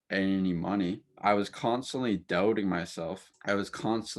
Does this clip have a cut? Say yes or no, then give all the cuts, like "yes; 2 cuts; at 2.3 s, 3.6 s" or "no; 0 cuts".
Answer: yes; 2 cuts; at 1.1 s, 3.3 s